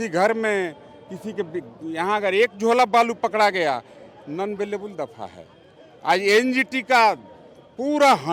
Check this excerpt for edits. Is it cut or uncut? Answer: uncut